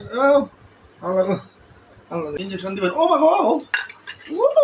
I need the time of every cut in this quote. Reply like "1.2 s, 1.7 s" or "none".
2.4 s